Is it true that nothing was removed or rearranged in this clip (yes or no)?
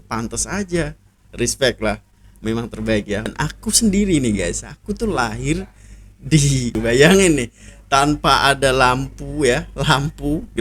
no